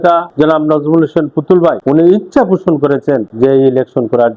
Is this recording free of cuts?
yes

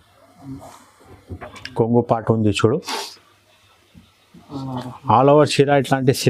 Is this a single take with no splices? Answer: yes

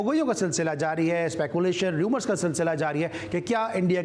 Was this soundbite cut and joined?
no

